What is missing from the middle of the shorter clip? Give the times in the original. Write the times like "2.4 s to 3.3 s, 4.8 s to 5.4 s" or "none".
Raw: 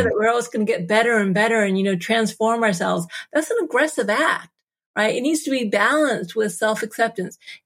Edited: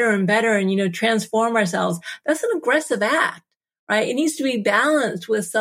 none